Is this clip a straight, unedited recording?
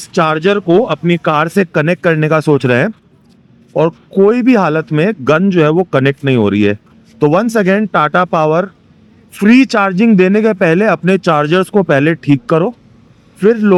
yes; 0 cuts

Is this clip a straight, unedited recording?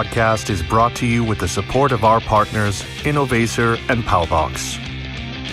no; 1 cut; at 4.5 s

